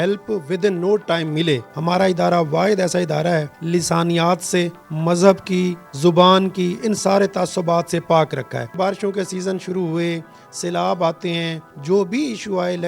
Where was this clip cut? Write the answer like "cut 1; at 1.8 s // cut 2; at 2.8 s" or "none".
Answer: cut 1; at 1.7 s // cut 2; at 3.6 s // cut 3; at 8.7 s // cut 4; at 11.6 s